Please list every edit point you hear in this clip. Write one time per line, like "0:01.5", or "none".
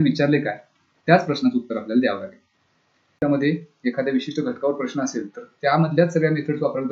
0:03.2